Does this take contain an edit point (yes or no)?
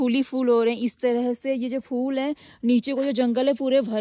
no